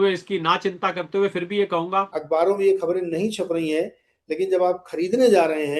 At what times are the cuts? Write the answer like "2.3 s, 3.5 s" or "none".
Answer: 2.2 s

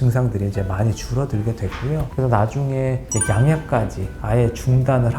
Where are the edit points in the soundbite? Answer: 2.1 s, 3.1 s

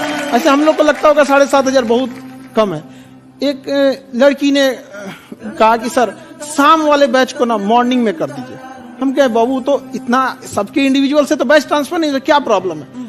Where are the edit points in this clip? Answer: none

